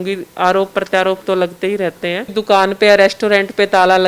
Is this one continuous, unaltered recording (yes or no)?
no